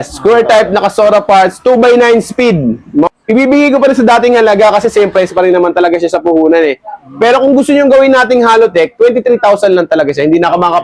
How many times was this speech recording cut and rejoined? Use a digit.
1